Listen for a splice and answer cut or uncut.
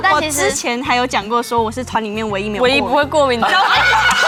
uncut